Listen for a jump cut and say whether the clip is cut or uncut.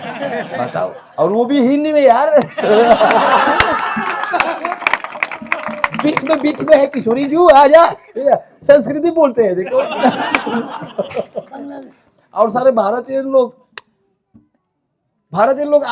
uncut